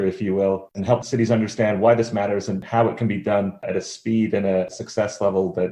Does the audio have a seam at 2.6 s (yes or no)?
yes